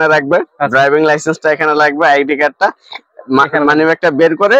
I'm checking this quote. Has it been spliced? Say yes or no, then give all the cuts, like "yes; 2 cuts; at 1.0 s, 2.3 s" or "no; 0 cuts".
no; 0 cuts